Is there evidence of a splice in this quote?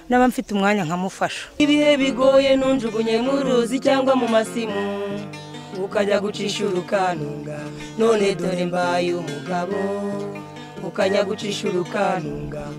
yes; 1 cut; at 1.6 s

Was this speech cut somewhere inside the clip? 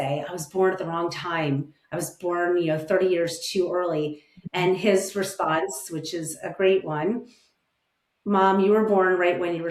no; 0 cuts

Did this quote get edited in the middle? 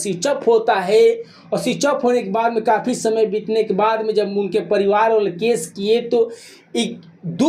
no; 0 cuts

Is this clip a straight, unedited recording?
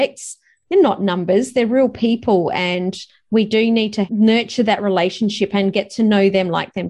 no; 1 cut; at 4.1 s

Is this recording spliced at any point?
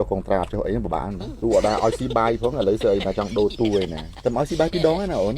yes; 2 cuts; at 1.3 s, 4.0 s

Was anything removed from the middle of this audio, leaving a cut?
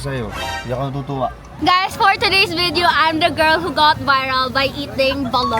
yes; 1 cut; at 1.5 s

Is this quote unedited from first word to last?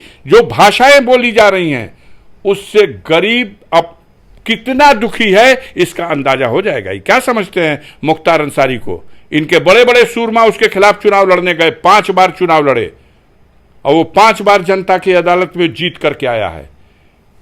yes; 0 cuts

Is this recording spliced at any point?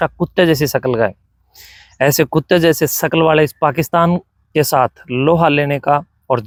no; 0 cuts

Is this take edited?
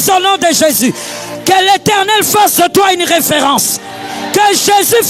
no; 0 cuts

